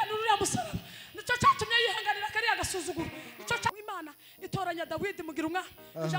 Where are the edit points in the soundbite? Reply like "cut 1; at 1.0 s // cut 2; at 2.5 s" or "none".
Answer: cut 1; at 3.7 s

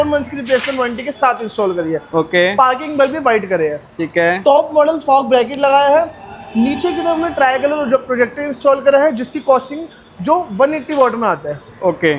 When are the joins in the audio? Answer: none

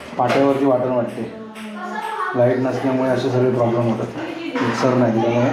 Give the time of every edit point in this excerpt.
none

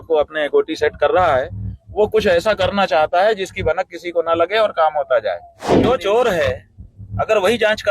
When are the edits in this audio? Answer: cut 1; at 5.7 s

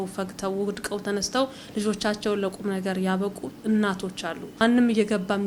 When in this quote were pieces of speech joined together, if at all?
cut 1; at 4.4 s

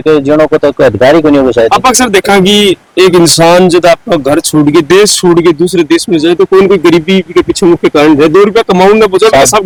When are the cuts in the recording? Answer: none

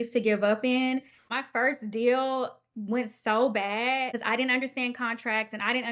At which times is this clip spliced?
cut 1; at 1.2 s

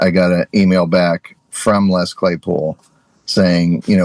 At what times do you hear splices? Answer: none

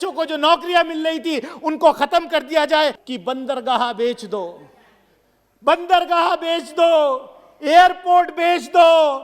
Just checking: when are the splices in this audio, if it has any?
cut 1; at 3.0 s

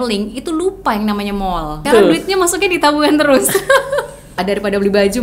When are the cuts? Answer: cut 1; at 1.9 s // cut 2; at 4.3 s

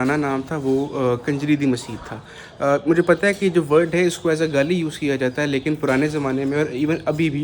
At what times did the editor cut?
none

